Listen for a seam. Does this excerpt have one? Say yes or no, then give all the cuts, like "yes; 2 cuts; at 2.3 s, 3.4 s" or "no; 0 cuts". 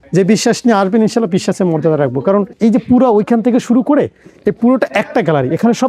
yes; 1 cut; at 2.5 s